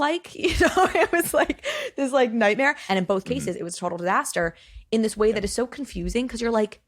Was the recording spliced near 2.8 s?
yes; 1 cut; at 2.8 s

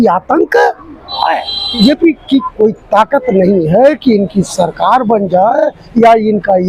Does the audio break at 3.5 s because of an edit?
no; 1 cut; at 1.8 s

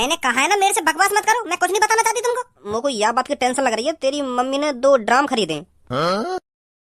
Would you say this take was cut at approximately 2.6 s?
yes; 1 cut; at 2.6 s

